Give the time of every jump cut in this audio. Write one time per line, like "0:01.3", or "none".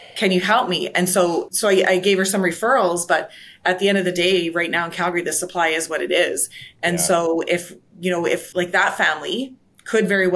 0:01.5